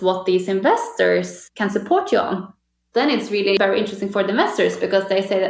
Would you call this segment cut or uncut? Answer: cut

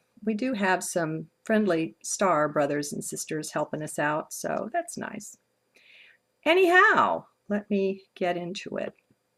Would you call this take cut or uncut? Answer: uncut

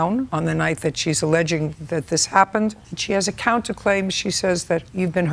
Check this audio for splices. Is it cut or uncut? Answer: uncut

